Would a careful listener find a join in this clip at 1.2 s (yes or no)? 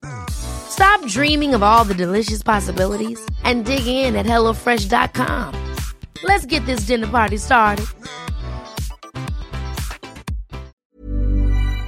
no